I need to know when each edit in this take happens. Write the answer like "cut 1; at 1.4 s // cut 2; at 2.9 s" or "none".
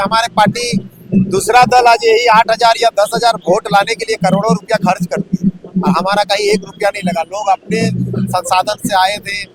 none